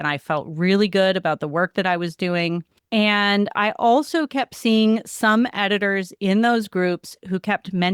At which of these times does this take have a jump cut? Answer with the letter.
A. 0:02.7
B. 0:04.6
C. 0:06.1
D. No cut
A